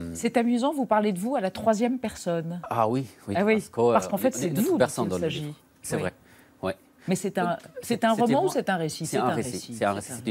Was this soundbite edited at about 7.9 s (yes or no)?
no